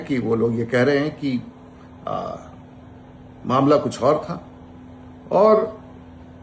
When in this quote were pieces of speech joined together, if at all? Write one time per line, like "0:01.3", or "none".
none